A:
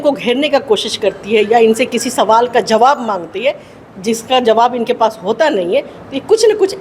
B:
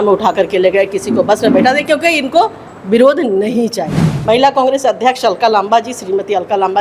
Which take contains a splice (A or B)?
B